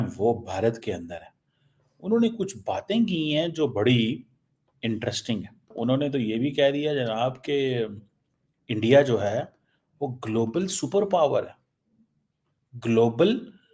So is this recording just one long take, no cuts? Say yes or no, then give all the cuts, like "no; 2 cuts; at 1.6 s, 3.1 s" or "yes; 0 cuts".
no; 1 cut; at 5.7 s